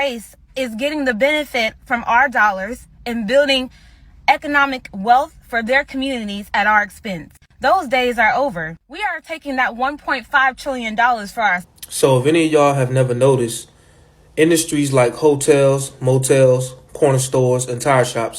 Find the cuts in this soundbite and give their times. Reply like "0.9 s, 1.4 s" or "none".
11.6 s